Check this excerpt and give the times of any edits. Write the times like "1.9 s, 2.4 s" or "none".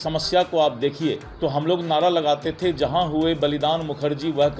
1.3 s